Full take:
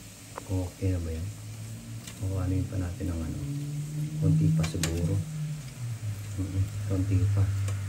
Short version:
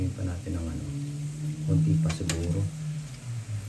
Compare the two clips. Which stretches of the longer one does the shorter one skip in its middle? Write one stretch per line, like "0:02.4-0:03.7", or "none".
none